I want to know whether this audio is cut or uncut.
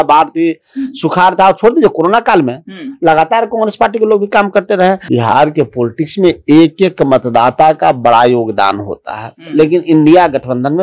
cut